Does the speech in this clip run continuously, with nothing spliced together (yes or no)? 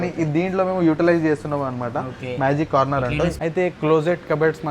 no